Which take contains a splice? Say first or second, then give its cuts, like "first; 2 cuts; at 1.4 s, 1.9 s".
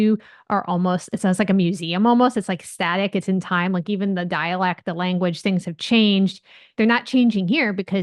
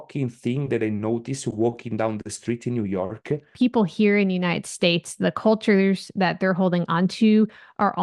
second; 1 cut; at 3.6 s